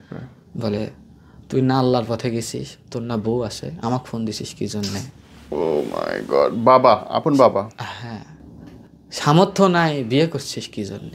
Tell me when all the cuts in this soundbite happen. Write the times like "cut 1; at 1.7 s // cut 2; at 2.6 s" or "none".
none